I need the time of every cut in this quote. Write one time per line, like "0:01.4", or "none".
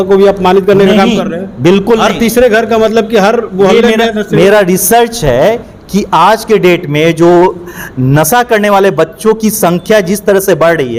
none